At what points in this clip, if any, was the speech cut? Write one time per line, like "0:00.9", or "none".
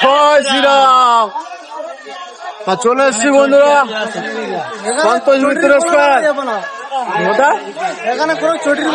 none